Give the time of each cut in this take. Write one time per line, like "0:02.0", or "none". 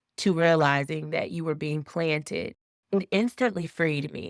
0:02.6